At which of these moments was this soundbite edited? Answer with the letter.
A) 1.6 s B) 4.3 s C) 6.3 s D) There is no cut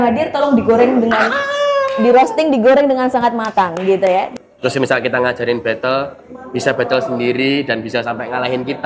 B